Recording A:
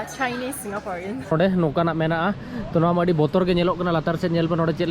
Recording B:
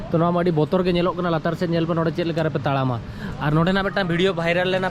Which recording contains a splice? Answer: A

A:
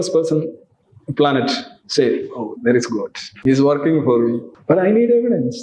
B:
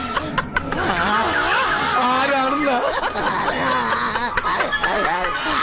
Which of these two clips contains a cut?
A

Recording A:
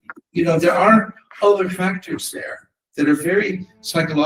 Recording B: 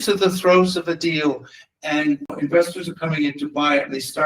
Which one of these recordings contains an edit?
B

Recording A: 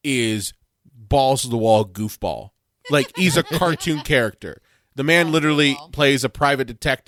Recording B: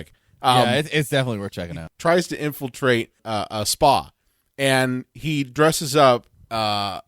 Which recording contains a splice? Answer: B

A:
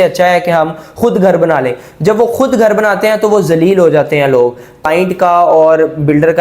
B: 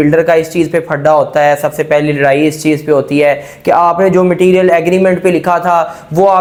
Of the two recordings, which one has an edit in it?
A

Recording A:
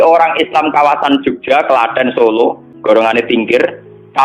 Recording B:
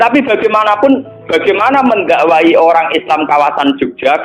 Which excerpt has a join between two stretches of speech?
A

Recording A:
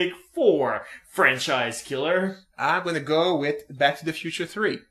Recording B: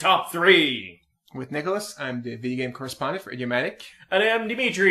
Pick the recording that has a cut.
A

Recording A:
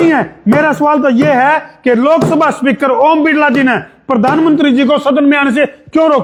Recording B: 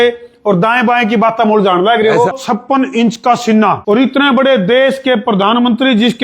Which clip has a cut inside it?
B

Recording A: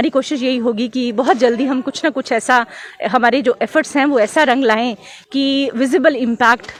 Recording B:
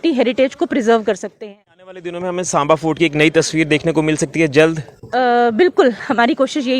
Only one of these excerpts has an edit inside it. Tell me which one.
B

